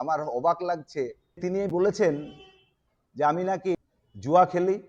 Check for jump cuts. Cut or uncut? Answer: cut